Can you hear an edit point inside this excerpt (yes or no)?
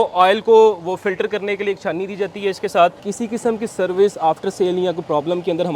yes